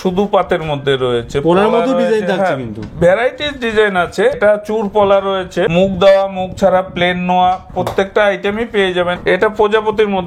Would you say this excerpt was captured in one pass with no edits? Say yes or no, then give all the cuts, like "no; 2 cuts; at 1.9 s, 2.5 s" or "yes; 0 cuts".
no; 3 cuts; at 4.4 s, 5.7 s, 9.2 s